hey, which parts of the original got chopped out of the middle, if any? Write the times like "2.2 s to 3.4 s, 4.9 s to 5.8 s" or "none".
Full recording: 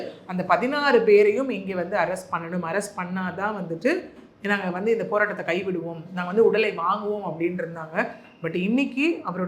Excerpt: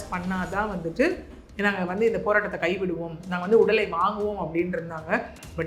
none